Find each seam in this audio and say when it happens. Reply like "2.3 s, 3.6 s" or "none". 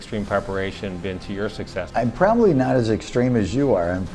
1.9 s